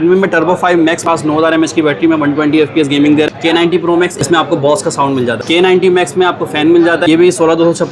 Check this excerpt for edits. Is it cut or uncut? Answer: cut